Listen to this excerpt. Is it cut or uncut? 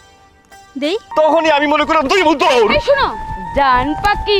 cut